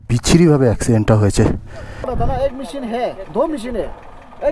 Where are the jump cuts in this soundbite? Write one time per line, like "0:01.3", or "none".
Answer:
0:02.1